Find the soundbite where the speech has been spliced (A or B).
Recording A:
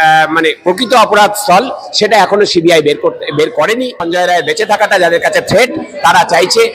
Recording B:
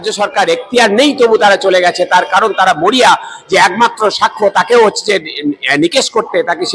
A